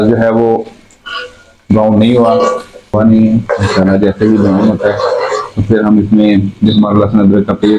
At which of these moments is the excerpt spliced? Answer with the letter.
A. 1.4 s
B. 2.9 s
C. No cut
B